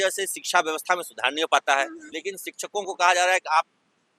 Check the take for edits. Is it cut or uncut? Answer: cut